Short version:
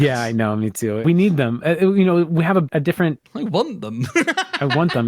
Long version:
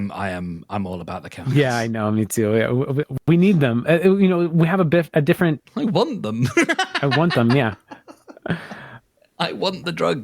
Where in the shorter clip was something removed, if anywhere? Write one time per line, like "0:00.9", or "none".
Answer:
0:01.0
0:02.6